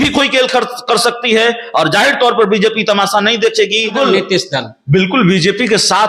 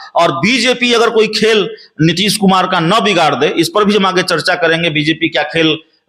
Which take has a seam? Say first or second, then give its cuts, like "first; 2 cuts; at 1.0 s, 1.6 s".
first; 1 cut; at 3.9 s